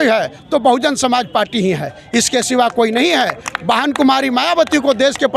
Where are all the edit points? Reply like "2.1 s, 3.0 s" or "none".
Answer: none